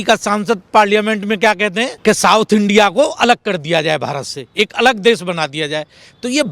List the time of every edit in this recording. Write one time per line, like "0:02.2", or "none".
0:01.9